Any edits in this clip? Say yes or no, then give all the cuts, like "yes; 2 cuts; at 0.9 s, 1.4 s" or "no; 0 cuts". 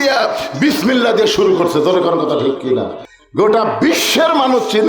yes; 1 cut; at 3.0 s